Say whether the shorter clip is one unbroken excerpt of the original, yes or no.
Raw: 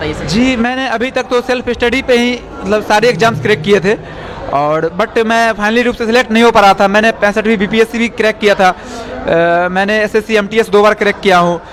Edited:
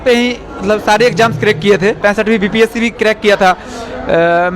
no